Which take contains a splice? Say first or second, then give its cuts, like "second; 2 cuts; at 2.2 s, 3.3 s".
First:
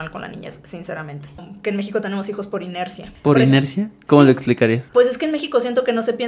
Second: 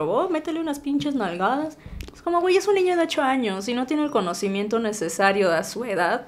first; 3 cuts; at 1.4 s, 3.0 s, 4.9 s